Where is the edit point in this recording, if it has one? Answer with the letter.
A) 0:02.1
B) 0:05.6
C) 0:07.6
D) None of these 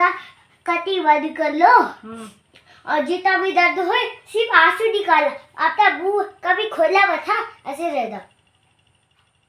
D